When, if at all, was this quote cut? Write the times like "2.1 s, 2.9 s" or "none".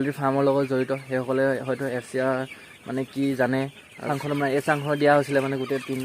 4.1 s

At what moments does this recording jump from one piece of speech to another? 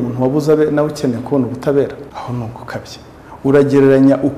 2.1 s

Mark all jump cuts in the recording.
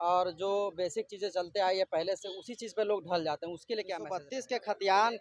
4.3 s

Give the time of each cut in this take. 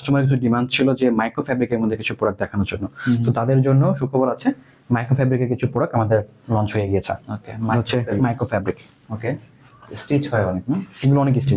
none

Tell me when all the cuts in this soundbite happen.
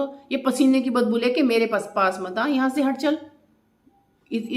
none

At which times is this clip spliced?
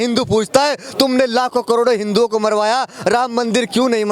none

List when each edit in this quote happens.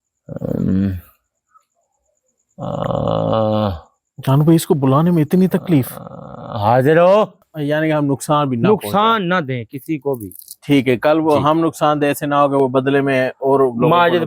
7.4 s

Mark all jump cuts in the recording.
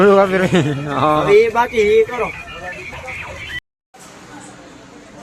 3.7 s

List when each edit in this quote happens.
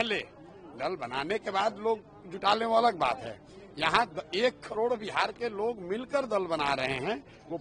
none

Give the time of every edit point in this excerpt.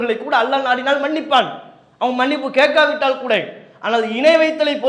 none

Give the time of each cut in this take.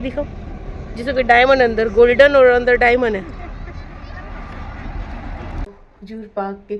5.9 s

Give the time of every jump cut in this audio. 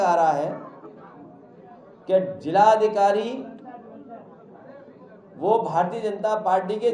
none

